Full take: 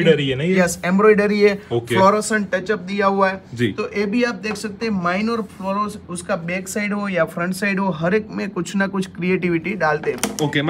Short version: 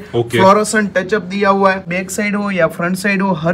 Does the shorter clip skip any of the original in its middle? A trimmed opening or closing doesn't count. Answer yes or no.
yes